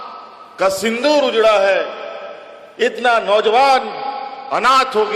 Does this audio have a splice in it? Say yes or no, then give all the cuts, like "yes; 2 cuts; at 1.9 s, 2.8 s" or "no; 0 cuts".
no; 0 cuts